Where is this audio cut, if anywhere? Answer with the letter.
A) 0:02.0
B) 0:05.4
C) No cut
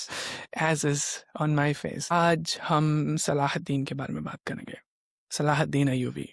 A